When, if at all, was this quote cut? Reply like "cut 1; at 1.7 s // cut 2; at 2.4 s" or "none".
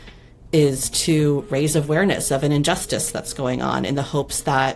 none